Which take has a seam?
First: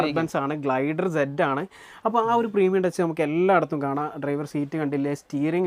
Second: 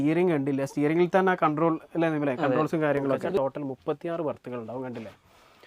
second; 1 cut; at 3.4 s

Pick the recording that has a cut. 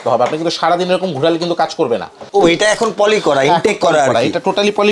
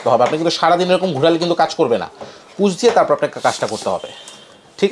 first; 1 cut; at 2.2 s

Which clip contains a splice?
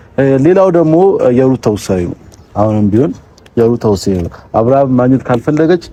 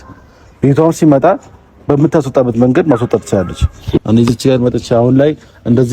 second; 1 cut; at 4.0 s

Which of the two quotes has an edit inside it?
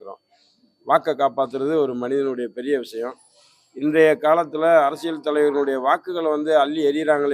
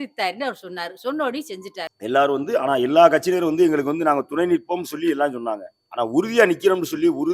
second; 1 cut; at 1.8 s

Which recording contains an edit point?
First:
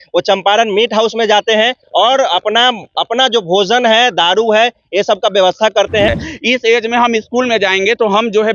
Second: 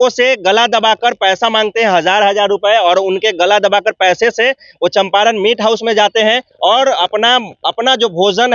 first; 1 cut; at 6.2 s

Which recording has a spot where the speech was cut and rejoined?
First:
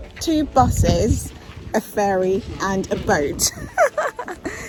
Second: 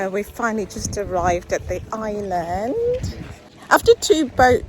second; 1 cut; at 3.5 s

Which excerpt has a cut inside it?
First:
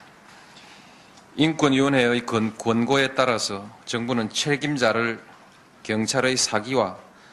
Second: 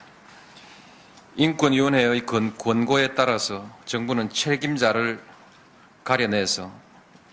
second; 1 cut; at 5.8 s

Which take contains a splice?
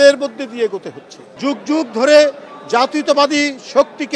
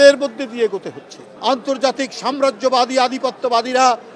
second; 1 cut; at 1.2 s

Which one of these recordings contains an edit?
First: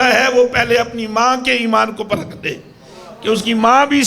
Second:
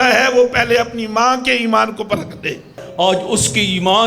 second; 1 cut; at 2.8 s

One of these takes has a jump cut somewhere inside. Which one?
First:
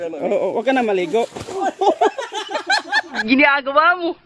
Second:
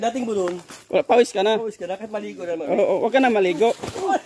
first; 1 cut; at 3.3 s

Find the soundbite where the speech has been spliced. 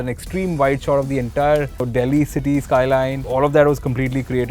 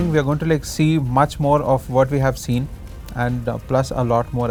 first; 2 cuts; at 1.8 s, 3.2 s

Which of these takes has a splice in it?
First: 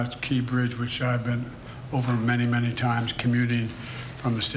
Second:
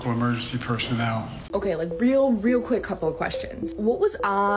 second; 1 cut; at 1.4 s

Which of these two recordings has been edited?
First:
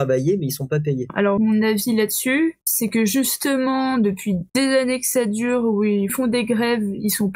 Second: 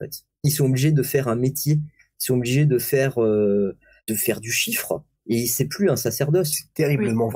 first; 4 cuts; at 1.1 s, 2.7 s, 4.5 s, 6.1 s

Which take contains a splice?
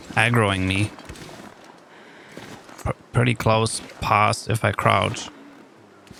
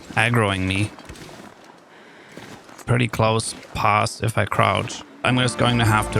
second; 2 cuts; at 2.8 s, 5.2 s

